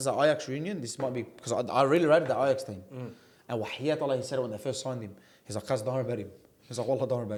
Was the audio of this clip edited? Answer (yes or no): no